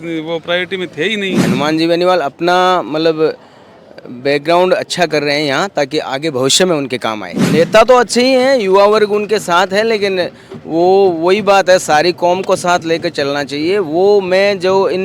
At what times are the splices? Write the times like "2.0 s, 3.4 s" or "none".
1.4 s, 7.3 s